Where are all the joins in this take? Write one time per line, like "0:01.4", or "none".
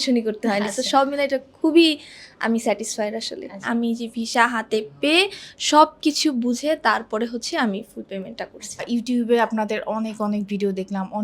0:03.6
0:08.8